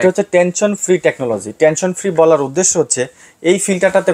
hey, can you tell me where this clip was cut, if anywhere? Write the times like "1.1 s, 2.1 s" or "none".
none